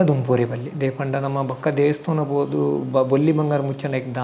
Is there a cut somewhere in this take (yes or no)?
no